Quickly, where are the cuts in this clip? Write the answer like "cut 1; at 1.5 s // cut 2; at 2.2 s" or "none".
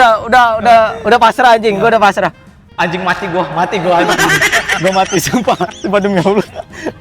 none